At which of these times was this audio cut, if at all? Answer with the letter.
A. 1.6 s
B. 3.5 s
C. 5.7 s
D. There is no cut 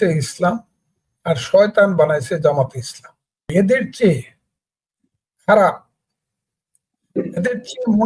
B